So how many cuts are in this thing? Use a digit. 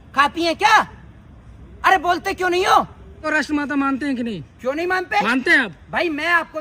1